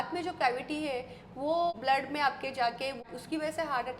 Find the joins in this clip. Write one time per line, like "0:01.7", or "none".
0:01.7
0:03.1